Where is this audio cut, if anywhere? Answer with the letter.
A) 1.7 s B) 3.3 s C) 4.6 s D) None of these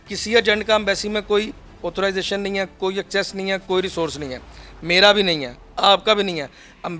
D